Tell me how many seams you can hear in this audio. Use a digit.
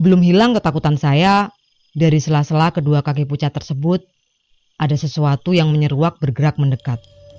0